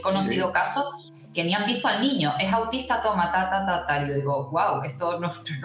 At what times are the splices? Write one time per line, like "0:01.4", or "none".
none